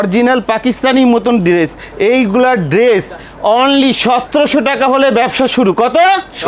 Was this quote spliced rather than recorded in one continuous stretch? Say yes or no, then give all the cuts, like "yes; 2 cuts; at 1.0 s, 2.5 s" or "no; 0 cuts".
no; 0 cuts